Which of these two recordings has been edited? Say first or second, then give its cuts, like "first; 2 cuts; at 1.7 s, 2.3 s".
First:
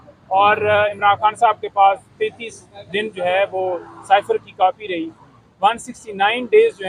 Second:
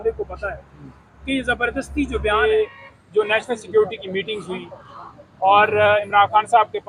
second; 1 cut; at 2.4 s